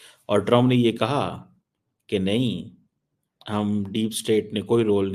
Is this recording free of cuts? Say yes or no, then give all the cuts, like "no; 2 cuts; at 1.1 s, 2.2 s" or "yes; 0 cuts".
yes; 0 cuts